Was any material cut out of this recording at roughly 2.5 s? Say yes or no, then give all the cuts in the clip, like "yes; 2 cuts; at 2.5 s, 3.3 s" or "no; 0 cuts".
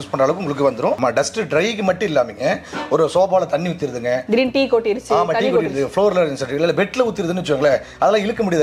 no; 1 cut; at 1.0 s